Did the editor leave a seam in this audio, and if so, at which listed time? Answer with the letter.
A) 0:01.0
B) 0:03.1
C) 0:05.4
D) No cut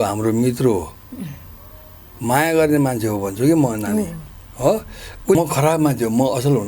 C